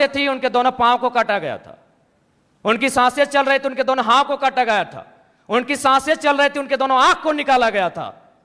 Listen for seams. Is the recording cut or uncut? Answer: uncut